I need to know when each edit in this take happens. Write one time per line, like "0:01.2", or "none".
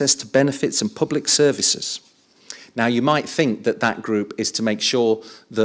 none